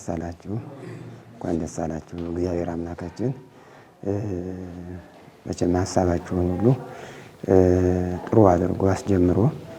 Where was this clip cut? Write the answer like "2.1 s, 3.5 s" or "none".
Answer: none